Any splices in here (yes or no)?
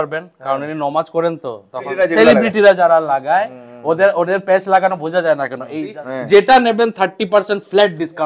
yes